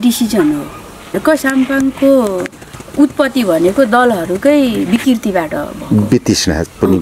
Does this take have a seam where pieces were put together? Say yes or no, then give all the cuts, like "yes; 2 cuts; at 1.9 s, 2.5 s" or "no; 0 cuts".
yes; 1 cut; at 1.2 s